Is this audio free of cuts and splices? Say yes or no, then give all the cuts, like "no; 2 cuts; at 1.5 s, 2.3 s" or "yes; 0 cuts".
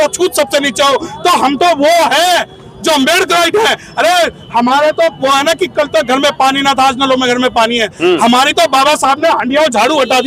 yes; 0 cuts